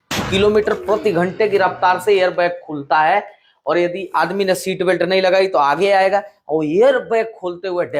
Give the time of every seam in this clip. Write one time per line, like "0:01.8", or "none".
none